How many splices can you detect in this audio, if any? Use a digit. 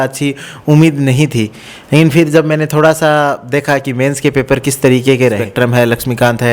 1